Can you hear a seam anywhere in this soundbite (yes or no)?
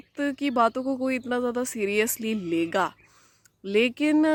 no